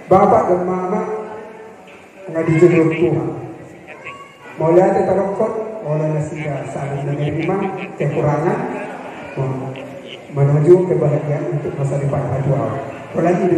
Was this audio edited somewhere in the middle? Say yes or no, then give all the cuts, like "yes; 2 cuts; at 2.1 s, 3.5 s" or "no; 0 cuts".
no; 0 cuts